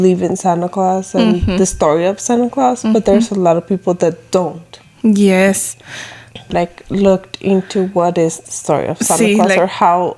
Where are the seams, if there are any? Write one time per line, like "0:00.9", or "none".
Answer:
0:06.5